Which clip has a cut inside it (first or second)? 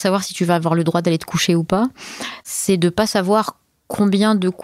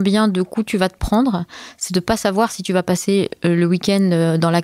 first